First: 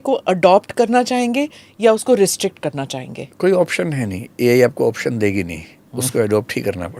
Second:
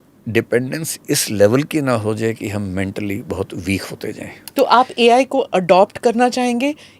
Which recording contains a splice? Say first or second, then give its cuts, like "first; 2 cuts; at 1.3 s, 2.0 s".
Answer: second; 1 cut; at 4.3 s